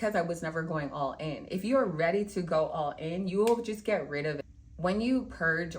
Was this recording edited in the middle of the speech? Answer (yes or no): yes